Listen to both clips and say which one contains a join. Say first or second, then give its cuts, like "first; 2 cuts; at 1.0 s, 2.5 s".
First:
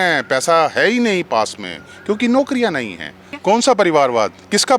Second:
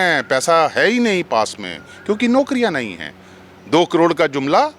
first; 1 cut; at 3.3 s